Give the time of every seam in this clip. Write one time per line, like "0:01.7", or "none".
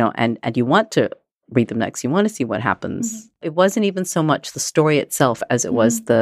0:03.2